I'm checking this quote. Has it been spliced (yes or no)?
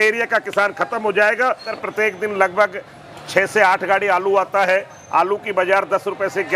yes